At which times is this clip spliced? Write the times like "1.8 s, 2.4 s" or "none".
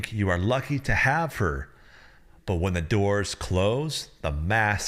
none